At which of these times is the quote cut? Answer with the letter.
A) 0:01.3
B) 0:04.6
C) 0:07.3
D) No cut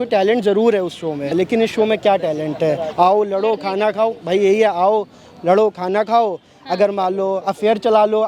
A